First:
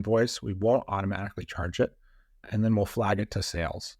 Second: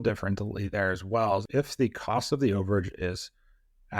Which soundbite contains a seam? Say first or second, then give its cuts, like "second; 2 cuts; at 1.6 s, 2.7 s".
second; 1 cut; at 1.5 s